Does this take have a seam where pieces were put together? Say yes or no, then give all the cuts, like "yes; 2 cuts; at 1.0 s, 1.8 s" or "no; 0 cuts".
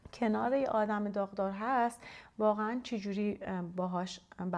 no; 0 cuts